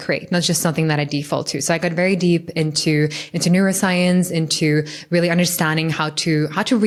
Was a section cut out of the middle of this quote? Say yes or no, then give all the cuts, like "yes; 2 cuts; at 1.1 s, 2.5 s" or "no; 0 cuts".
no; 0 cuts